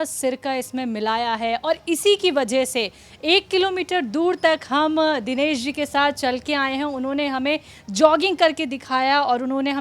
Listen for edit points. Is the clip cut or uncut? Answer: uncut